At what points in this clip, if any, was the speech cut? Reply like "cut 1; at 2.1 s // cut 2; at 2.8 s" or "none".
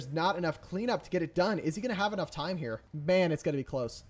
cut 1; at 2.8 s